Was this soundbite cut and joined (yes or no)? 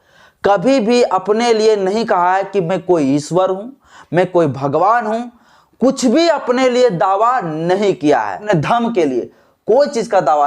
yes